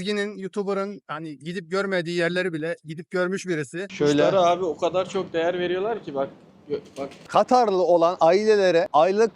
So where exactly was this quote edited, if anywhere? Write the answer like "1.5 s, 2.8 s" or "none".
3.9 s, 7.3 s